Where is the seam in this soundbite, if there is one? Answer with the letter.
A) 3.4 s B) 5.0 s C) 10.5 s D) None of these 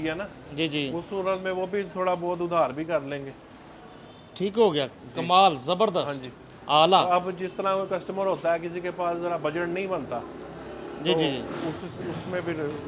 D